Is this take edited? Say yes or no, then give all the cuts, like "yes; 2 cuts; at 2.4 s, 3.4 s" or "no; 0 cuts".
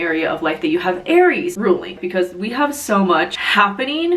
yes; 1 cut; at 1.8 s